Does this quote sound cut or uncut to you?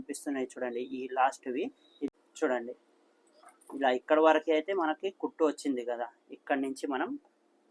cut